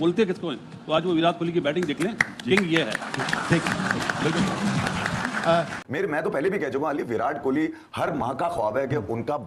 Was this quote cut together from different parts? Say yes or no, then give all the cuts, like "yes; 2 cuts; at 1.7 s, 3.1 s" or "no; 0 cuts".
yes; 1 cut; at 5.8 s